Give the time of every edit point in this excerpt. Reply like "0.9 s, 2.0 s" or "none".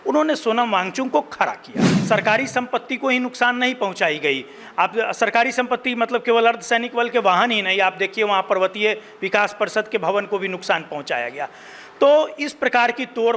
1.9 s